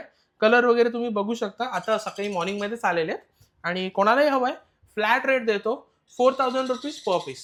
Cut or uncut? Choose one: uncut